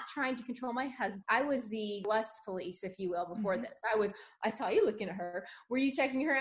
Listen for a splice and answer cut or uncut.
cut